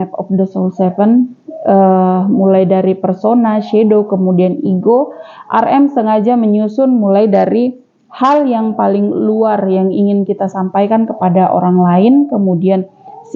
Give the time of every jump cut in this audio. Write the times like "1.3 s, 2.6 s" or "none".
none